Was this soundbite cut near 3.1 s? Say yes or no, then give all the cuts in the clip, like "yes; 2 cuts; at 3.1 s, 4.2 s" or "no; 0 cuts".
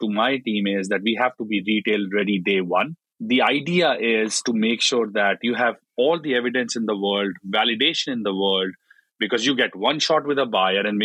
yes; 1 cut; at 3.1 s